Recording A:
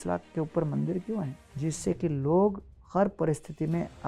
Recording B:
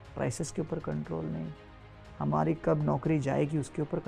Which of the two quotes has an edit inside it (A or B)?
A